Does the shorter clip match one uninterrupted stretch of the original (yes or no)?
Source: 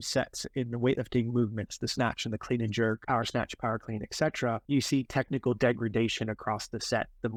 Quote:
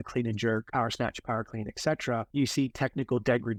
yes